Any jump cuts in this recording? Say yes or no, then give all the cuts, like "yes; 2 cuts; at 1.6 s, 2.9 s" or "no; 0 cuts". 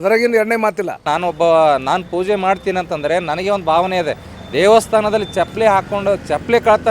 yes; 1 cut; at 1.0 s